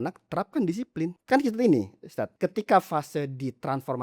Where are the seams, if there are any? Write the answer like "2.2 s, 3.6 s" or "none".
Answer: 1.2 s, 2.3 s